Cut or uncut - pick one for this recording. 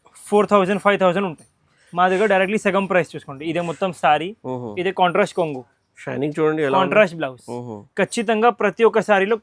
uncut